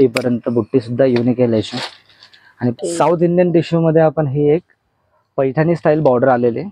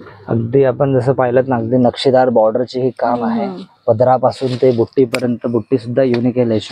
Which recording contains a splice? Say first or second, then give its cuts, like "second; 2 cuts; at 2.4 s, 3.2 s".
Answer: first; 1 cut; at 2.7 s